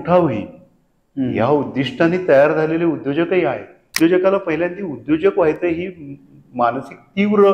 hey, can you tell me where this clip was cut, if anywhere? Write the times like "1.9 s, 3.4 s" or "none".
4.0 s